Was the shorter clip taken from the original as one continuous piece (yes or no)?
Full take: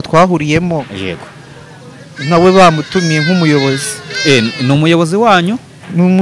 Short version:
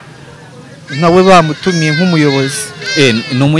yes